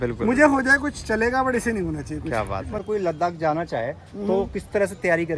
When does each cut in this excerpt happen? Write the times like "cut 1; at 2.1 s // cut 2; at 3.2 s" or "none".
cut 1; at 2.8 s